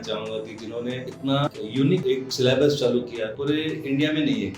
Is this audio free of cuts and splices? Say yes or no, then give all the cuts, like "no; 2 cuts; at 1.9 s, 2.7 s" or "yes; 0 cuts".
no; 3 cuts; at 1.1 s, 2.0 s, 3.3 s